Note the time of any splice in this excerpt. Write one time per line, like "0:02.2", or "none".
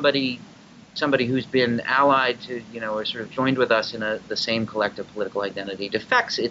0:01.0